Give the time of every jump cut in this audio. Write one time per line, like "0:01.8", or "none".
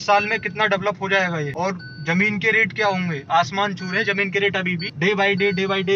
0:01.5
0:04.9